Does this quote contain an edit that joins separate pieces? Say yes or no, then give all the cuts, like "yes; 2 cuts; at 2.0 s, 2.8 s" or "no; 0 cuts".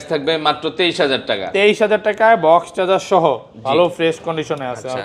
no; 0 cuts